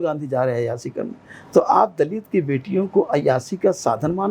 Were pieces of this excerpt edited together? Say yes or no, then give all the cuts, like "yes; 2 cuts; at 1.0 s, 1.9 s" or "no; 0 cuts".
no; 0 cuts